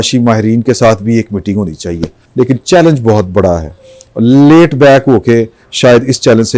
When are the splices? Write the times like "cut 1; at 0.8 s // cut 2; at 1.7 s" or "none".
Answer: cut 1; at 2.2 s